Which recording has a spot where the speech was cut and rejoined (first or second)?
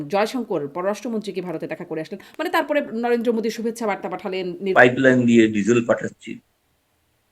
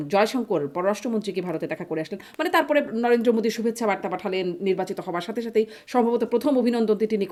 first